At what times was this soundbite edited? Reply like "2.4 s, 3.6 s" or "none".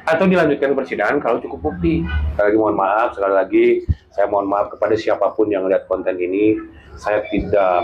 2.2 s